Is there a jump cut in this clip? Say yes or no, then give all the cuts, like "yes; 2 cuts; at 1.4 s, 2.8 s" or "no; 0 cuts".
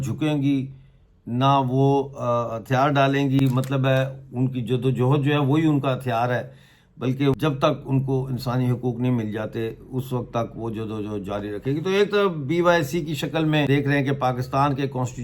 yes; 2 cuts; at 7.4 s, 13.7 s